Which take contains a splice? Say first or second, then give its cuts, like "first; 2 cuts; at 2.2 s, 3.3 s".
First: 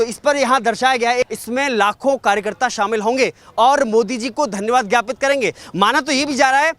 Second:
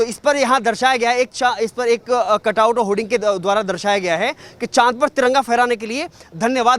first; 1 cut; at 1.3 s